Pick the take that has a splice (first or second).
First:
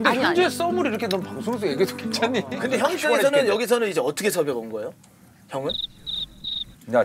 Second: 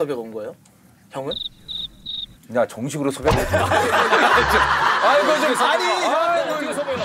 first